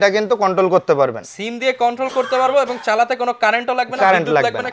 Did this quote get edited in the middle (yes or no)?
no